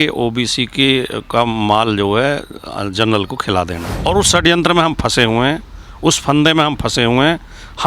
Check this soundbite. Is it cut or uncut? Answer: cut